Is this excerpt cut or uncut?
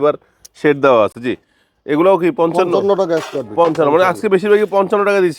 uncut